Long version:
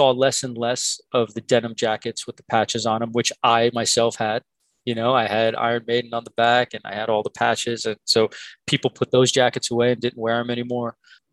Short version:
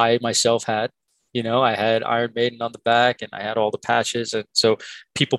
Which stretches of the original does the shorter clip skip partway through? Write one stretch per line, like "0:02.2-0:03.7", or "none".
none